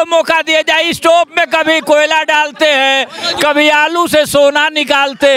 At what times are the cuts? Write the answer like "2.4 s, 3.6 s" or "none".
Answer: none